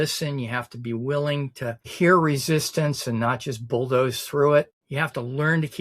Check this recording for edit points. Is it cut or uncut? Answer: cut